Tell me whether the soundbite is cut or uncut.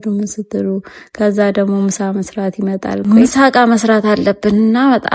cut